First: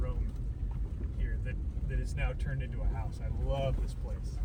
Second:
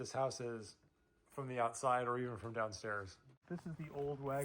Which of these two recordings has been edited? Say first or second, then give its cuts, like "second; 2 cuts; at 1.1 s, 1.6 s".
second; 1 cut; at 3.4 s